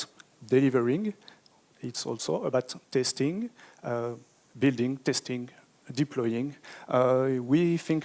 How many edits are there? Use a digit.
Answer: 0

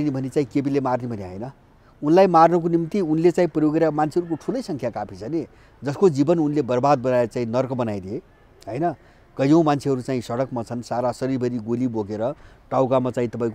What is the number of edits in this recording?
0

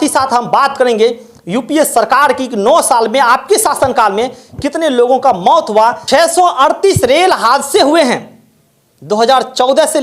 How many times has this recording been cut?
1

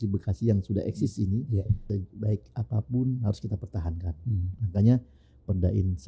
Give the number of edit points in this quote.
1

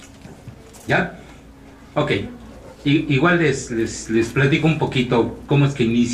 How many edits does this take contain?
1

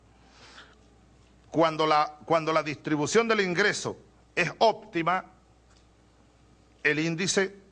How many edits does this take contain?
1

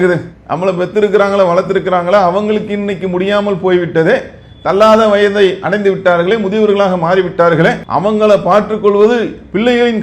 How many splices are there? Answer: 1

